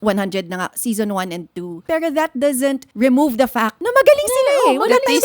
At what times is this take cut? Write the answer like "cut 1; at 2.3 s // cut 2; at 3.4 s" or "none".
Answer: cut 1; at 1.8 s // cut 2; at 2.9 s // cut 3; at 3.8 s